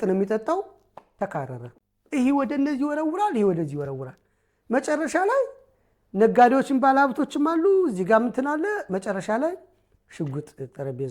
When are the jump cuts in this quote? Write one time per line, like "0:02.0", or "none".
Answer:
0:01.7

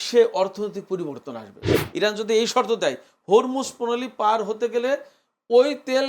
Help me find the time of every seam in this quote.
0:01.8

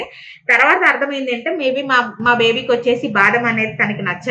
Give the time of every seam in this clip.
none

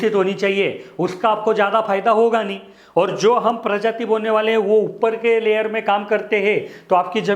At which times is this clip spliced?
none

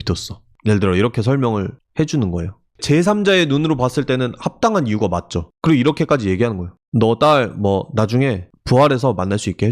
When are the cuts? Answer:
0:02.8

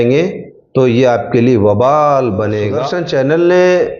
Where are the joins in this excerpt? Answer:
0:02.8

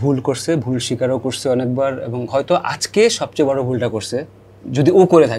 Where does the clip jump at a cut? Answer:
none

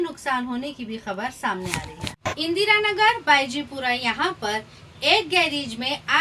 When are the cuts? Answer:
0:02.2

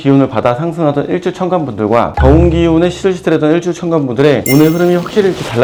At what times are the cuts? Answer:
none

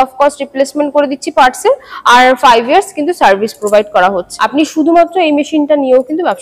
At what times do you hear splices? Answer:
0:04.3

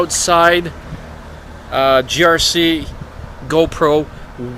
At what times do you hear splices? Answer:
none

